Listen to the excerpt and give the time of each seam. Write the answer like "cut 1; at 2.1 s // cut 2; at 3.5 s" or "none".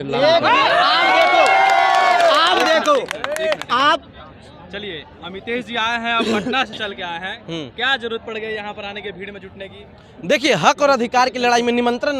none